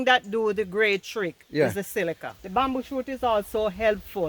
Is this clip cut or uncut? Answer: cut